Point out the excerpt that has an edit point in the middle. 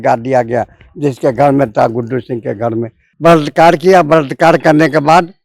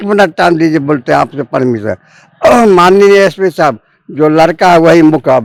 first; 1 cut; at 3.0 s

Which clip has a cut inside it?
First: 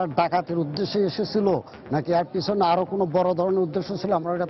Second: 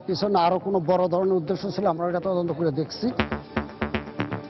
second; 1 cut; at 3.5 s

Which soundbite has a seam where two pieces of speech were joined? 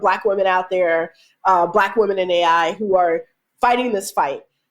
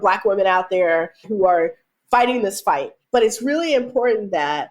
second; 2 cuts; at 1.3 s, 3.0 s

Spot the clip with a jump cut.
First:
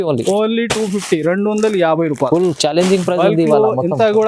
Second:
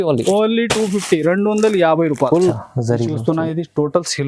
second; 1 cut; at 2.6 s

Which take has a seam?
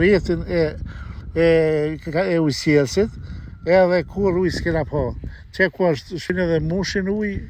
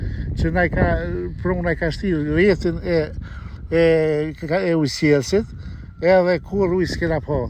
first; 1 cut; at 6.3 s

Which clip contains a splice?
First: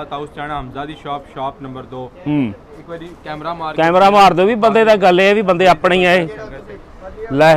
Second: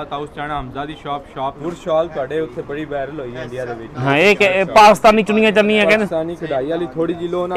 second; 1 cut; at 1.6 s

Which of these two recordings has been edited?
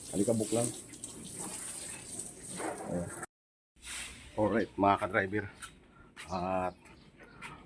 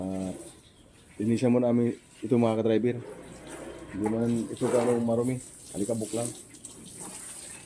first; 1 cut; at 3.2 s

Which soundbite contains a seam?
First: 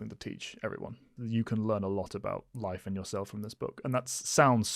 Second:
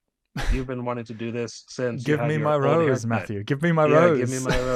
first; 1 cut; at 1.1 s

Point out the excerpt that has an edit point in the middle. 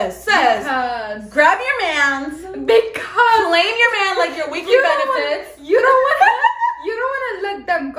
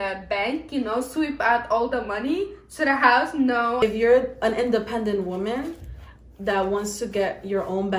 second; 1 cut; at 3.8 s

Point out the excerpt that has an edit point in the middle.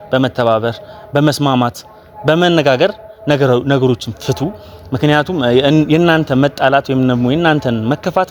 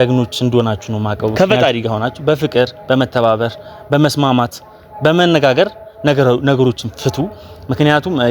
second; 1 cut; at 1.3 s

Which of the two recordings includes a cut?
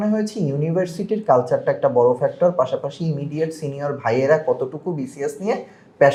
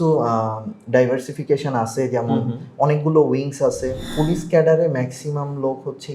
second; 1 cut; at 4.1 s

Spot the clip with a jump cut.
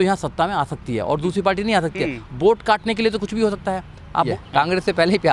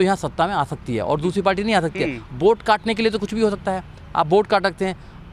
first; 1 cut; at 4.3 s

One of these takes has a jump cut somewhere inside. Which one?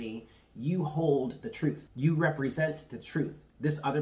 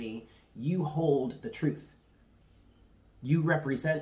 first; 1 cut; at 1.9 s

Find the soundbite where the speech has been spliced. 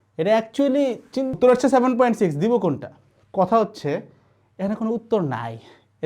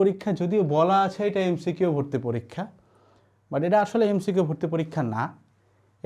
first; 1 cut; at 1.3 s

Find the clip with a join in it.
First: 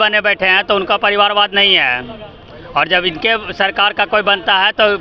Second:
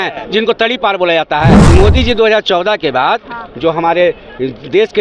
second; 1 cut; at 1.7 s

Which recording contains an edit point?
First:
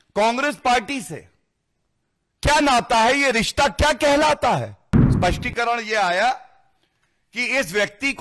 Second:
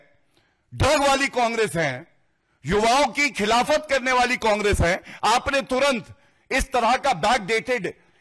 first; 1 cut; at 5.1 s

